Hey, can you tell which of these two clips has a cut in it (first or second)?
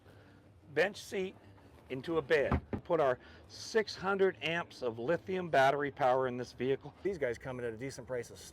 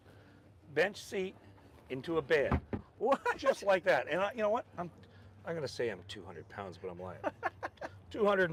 first